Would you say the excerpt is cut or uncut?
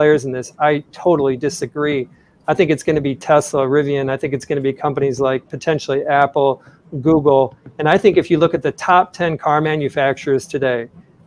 uncut